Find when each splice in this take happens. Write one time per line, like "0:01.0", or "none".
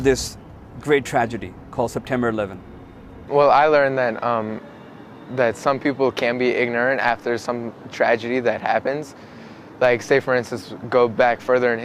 0:07.3